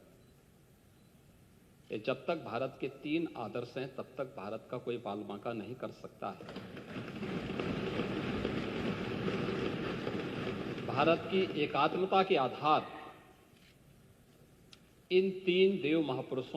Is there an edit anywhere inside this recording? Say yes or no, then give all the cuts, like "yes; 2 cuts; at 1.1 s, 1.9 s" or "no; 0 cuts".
no; 0 cuts